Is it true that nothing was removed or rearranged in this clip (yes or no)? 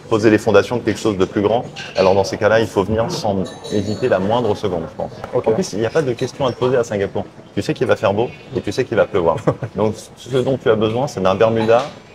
no